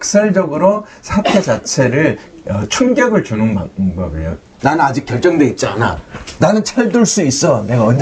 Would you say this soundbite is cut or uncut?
cut